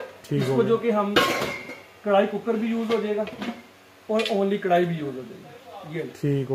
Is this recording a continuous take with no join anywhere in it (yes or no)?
yes